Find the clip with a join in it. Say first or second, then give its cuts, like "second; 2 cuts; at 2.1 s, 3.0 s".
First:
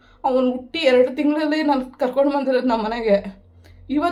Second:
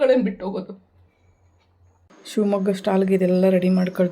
second; 1 cut; at 2.1 s